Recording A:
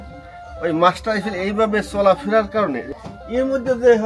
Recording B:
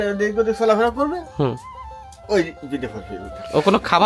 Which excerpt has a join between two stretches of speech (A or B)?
A